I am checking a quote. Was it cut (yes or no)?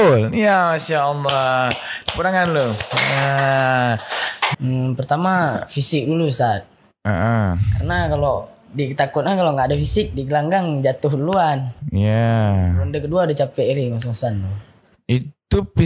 yes